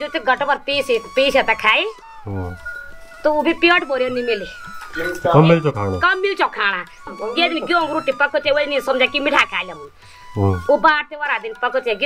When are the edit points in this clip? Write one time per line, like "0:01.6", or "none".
0:07.1